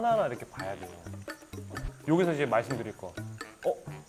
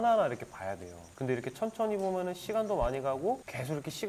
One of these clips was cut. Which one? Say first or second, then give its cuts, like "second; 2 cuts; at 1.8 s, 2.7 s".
first; 1 cut; at 1.1 s